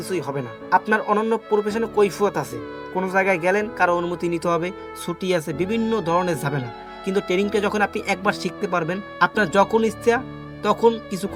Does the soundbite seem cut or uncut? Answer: uncut